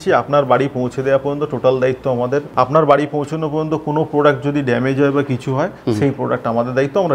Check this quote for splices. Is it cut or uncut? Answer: cut